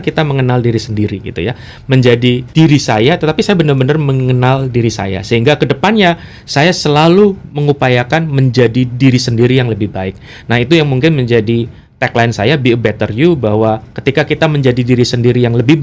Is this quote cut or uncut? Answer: uncut